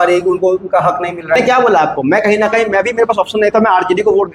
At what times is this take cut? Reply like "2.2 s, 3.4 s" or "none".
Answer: 1.4 s

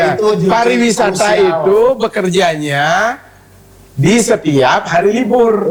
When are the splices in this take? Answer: none

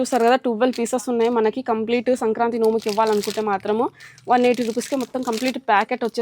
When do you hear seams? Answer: none

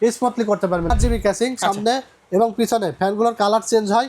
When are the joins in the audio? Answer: 0.9 s

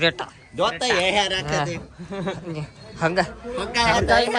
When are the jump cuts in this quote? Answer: none

